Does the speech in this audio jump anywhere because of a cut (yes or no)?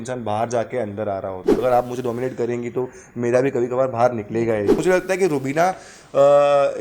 yes